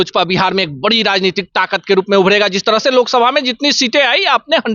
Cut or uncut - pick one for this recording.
uncut